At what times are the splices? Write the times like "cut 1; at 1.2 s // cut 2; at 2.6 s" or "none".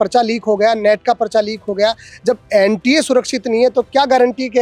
none